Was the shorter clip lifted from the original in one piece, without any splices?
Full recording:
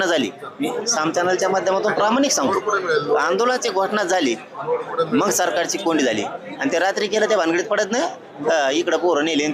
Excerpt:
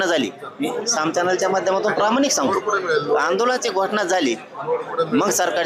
yes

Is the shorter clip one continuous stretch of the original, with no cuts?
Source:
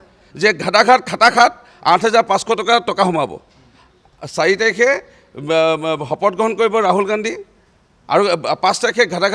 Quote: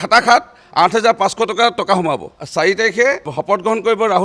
no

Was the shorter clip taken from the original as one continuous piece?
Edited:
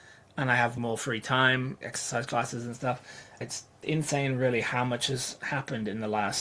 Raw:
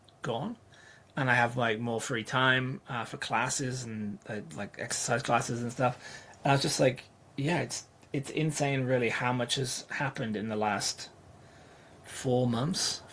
no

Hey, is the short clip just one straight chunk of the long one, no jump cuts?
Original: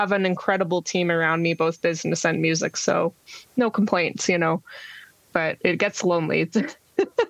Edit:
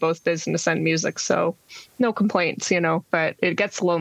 no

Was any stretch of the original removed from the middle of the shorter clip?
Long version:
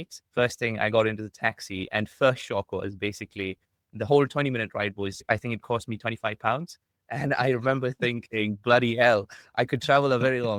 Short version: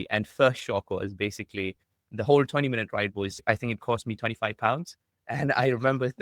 no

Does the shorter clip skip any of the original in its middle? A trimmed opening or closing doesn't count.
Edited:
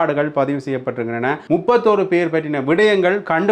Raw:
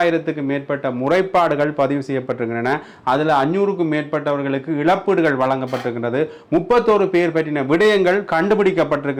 yes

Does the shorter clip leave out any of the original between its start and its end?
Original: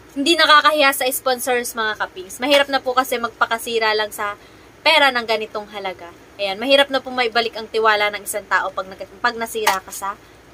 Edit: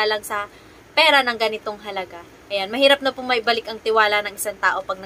no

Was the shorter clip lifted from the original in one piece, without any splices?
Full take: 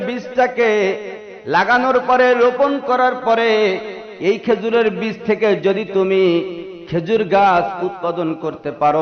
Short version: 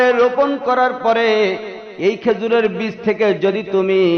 yes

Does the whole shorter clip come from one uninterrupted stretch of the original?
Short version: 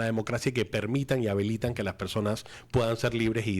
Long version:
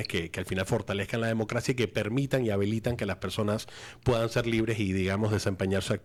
no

